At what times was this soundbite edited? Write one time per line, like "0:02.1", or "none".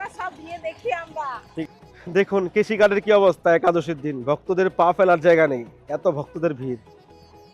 0:01.8